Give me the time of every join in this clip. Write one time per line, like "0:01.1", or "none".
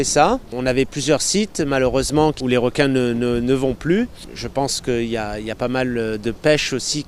none